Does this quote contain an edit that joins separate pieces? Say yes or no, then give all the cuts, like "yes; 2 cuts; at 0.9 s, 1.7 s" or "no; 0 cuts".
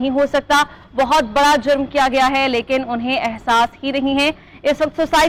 no; 0 cuts